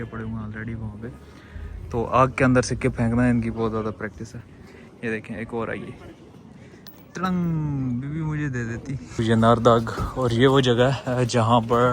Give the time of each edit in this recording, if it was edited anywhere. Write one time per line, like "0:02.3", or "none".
0:09.2

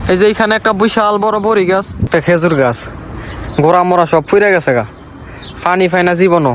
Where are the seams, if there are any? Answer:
0:02.0

